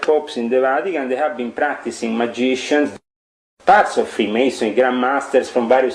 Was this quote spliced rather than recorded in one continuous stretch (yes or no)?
yes